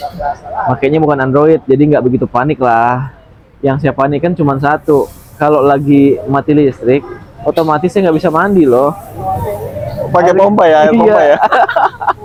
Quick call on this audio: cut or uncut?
uncut